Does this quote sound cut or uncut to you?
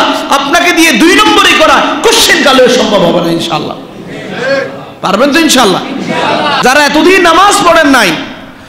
cut